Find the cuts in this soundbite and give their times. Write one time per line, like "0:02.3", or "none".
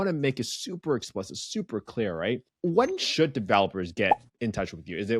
0:02.5
0:04.3